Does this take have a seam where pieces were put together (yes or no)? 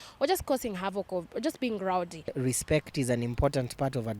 yes